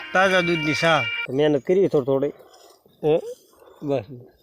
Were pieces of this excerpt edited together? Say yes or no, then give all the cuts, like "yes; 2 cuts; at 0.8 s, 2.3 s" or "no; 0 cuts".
yes; 1 cut; at 1.2 s